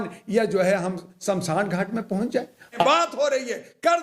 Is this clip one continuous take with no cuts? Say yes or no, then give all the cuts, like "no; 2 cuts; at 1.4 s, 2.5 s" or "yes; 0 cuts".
no; 1 cut; at 2.8 s